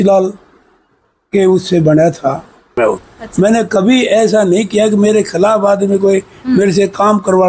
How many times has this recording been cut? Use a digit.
1